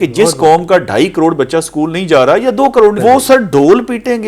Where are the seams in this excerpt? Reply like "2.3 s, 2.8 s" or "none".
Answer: 3.0 s